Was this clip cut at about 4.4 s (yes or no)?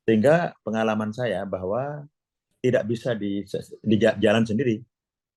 no